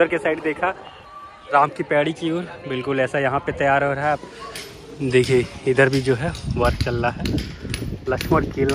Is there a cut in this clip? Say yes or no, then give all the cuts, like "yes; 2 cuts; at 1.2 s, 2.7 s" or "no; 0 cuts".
yes; 1 cut; at 4.2 s